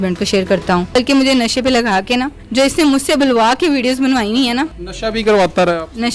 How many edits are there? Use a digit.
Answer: 2